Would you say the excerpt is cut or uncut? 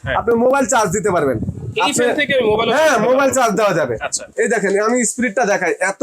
cut